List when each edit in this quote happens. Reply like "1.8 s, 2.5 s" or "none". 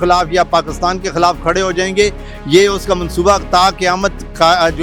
none